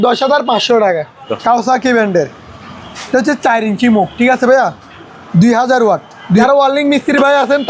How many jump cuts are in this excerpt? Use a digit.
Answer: 2